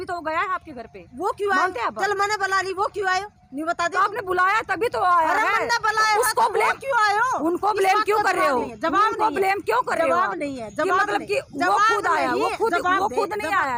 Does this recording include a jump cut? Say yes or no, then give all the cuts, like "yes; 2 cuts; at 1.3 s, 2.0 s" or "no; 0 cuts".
no; 0 cuts